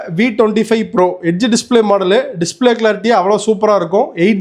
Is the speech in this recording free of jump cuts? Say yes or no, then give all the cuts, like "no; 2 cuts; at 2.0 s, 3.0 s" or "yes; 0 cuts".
yes; 0 cuts